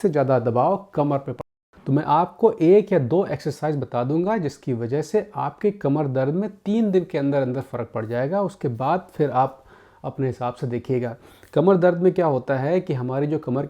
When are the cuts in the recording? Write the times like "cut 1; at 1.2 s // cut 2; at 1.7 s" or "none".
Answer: cut 1; at 1.5 s